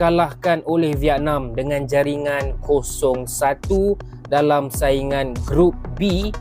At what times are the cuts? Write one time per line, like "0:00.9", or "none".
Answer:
none